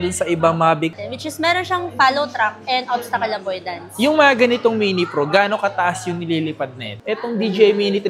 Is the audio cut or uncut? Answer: cut